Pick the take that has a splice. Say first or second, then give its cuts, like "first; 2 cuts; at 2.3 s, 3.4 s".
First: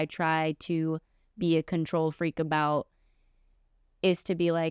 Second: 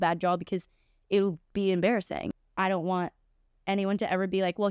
second; 1 cut; at 2.4 s